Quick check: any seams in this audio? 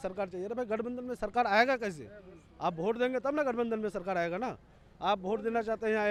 no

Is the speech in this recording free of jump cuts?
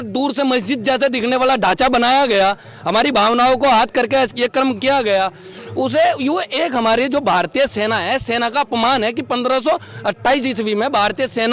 yes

